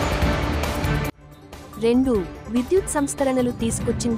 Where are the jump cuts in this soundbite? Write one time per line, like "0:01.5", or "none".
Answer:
none